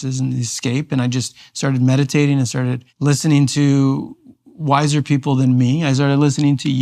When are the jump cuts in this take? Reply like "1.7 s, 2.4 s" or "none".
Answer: 2.9 s